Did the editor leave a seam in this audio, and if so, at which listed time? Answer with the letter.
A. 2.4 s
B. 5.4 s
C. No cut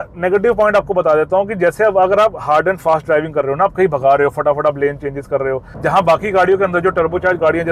C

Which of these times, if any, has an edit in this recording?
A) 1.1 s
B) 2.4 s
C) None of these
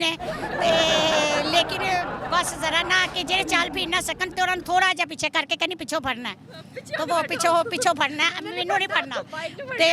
C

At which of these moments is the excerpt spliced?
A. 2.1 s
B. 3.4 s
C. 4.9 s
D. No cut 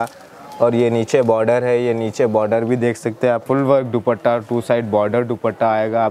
B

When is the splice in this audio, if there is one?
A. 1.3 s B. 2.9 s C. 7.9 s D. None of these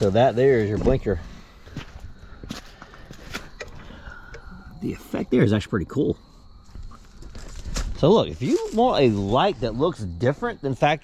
A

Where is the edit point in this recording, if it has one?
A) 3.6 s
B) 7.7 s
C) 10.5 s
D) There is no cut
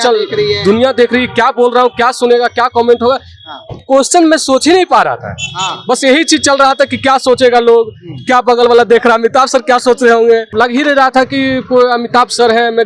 C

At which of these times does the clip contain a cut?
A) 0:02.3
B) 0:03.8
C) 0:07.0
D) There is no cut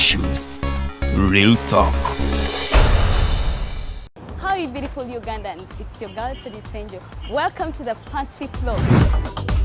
B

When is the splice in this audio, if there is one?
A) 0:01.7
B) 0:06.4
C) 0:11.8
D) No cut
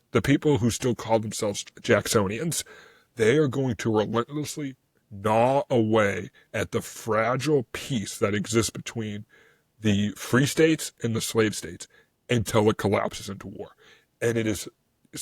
A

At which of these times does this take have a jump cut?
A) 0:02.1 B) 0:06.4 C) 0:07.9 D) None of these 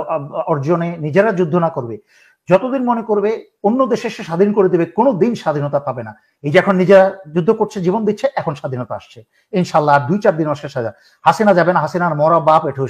D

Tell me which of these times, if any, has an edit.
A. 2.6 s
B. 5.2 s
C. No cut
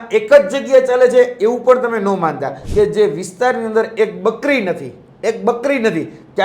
A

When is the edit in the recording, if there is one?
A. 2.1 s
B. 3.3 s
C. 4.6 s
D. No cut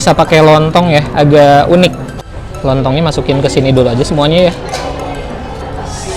A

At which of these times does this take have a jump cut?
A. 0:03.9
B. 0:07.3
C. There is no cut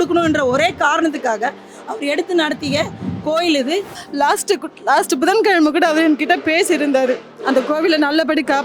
A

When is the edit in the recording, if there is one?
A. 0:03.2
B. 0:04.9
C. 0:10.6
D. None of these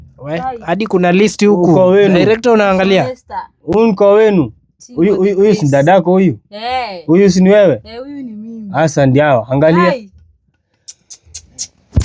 D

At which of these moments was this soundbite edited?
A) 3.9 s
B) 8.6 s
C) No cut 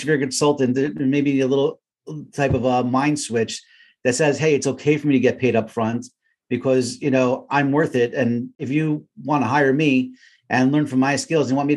B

